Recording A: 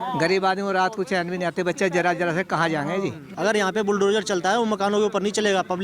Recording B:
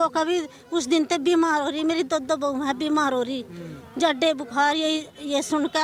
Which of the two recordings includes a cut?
A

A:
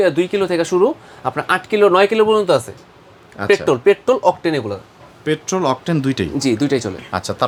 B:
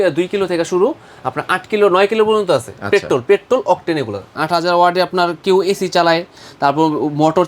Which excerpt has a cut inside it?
B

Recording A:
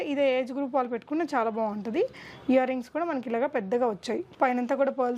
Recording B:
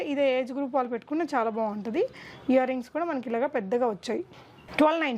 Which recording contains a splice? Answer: A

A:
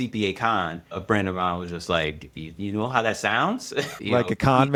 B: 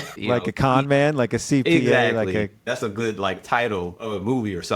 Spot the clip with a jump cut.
B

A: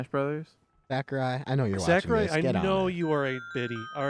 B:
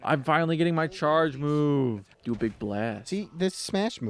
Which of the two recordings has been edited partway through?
B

